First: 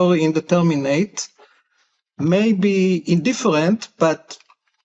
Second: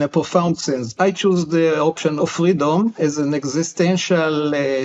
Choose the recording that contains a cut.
second; 2 cuts; at 0.9 s, 2.2 s

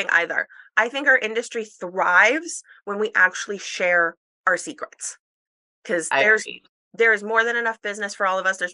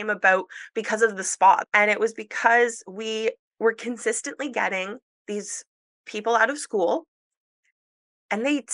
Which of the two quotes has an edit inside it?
second; 2 cuts; at 1.7 s, 5.9 s

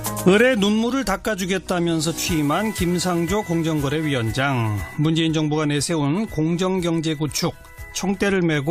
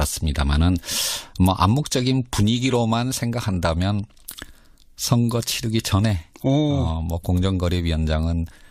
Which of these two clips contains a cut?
second; 1 cut; at 5.8 s

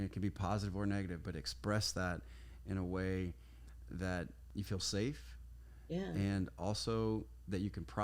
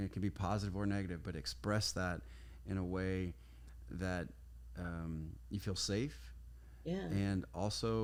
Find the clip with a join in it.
first; 1 cut; at 4.4 s

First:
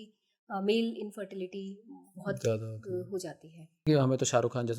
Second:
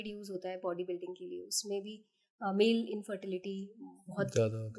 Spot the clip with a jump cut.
first; 1 cut; at 3.9 s

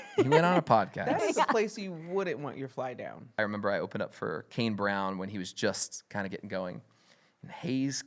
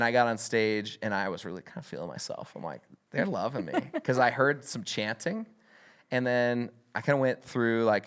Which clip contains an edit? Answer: first; 1 cut; at 3.3 s

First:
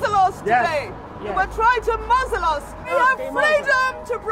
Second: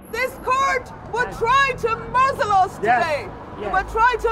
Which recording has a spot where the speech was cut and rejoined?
first; 1 cut; at 2.9 s

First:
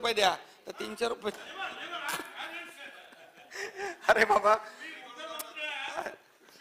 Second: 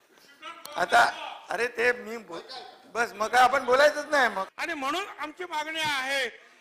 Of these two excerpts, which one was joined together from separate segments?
second; 1 cut; at 4.5 s

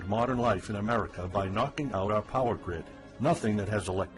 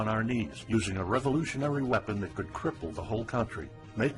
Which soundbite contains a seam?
second; 1 cut; at 1.7 s

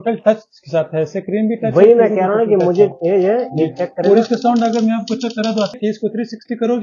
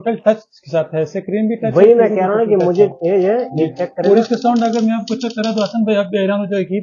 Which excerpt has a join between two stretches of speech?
first; 1 cut; at 5.7 s

